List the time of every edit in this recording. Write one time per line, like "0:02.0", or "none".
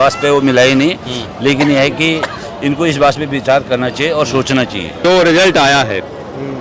0:05.0